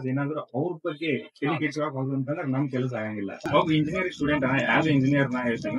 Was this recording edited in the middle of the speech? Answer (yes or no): yes